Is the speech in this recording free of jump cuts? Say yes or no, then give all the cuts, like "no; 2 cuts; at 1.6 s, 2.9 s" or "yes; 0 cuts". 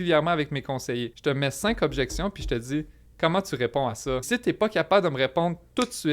no; 2 cuts; at 1.1 s, 4.2 s